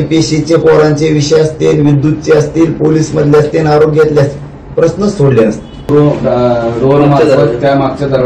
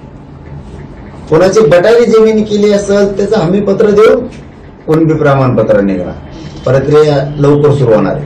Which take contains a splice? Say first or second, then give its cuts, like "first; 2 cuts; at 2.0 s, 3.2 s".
first; 1 cut; at 5.7 s